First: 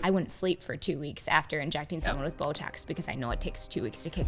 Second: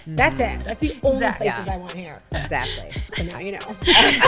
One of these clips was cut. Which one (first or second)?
second